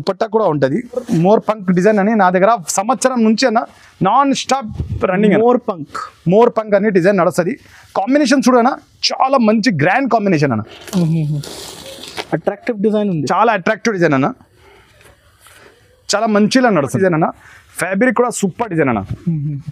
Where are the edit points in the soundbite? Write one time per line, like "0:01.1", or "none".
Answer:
0:01.1
0:16.9